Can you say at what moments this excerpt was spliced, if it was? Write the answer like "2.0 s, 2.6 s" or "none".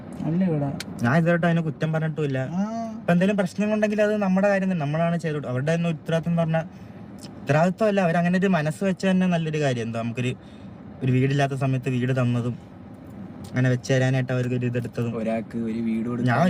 none